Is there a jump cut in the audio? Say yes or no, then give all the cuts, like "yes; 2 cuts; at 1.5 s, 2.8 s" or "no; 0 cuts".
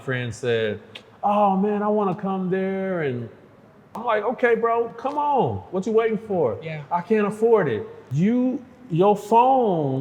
yes; 2 cuts; at 4.0 s, 8.0 s